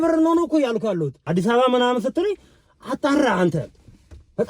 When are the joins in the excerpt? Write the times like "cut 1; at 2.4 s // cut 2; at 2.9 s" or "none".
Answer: cut 1; at 1.3 s